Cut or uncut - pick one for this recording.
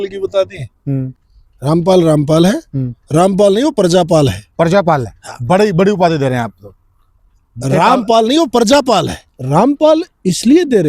cut